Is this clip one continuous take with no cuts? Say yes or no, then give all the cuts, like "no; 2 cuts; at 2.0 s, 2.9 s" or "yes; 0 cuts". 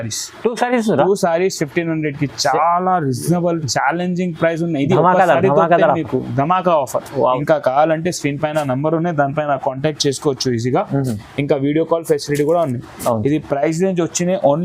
no; 1 cut; at 7.4 s